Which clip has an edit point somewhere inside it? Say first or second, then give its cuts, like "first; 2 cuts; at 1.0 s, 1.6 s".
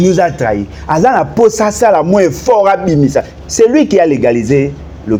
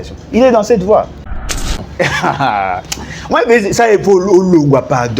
second; 1 cut; at 1.6 s